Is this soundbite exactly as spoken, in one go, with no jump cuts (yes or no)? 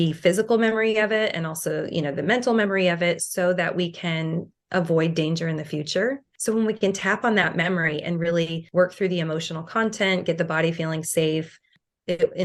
yes